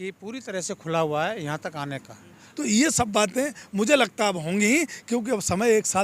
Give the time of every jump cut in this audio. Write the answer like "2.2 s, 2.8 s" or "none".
2.5 s